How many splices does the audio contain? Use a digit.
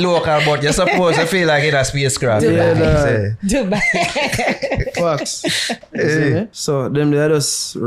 1